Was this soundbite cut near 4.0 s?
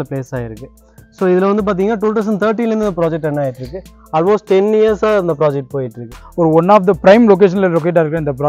no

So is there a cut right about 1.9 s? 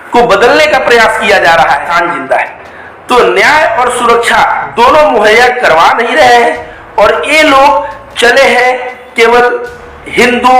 yes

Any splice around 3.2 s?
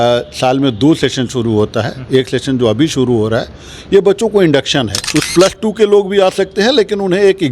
no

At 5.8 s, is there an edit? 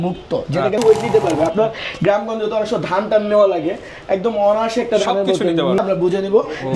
yes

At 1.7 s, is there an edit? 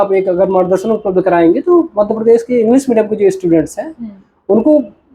no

